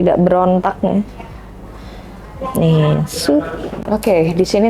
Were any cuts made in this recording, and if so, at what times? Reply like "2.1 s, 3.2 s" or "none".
3.7 s